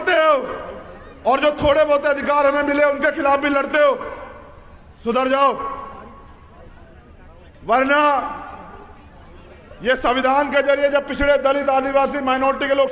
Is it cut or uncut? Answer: uncut